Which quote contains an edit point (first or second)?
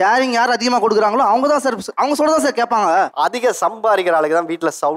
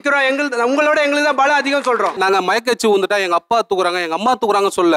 first